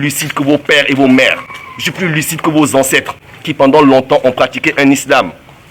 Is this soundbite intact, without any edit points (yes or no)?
yes